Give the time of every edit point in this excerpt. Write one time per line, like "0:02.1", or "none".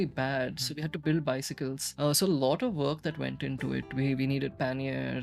0:01.8